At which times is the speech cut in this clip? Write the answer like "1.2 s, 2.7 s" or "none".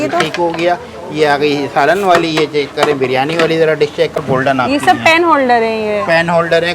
4.2 s

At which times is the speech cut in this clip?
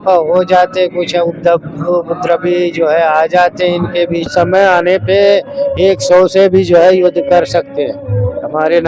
4.3 s

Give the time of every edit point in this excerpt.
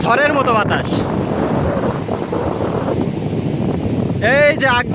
3.9 s

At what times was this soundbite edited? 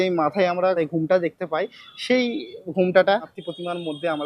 0.8 s, 3.3 s

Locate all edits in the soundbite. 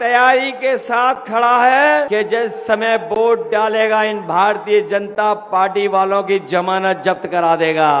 2.1 s

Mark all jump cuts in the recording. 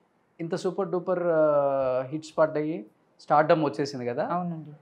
none

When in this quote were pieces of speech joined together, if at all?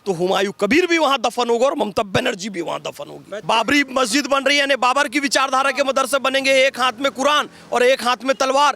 3.3 s

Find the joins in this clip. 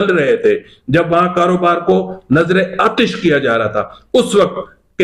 none

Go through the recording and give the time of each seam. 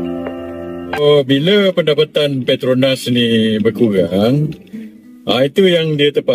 1.0 s

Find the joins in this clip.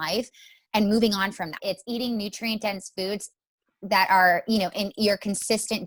1.6 s

